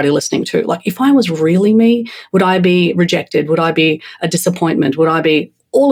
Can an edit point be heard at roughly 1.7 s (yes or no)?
no